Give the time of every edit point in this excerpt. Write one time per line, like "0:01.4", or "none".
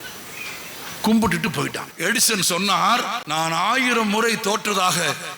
0:01.9
0:03.2